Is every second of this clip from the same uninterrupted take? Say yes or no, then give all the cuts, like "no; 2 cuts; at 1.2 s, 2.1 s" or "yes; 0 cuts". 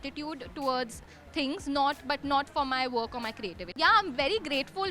no; 1 cut; at 3.7 s